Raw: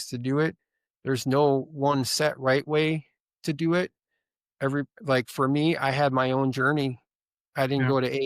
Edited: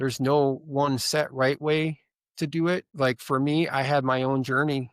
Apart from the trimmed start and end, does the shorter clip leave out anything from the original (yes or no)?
yes